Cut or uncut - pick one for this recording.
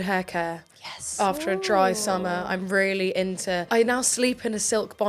cut